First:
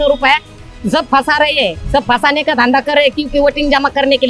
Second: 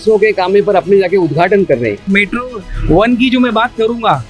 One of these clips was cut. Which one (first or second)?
second